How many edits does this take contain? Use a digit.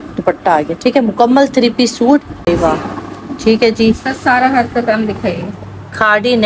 1